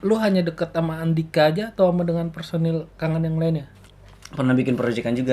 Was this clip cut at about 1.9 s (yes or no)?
no